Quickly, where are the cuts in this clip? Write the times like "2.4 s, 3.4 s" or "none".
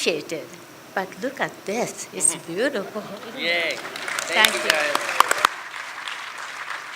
5.5 s